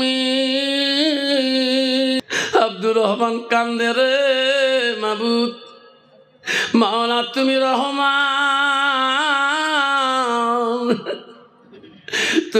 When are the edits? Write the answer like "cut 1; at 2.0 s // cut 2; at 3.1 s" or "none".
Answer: cut 1; at 2.2 s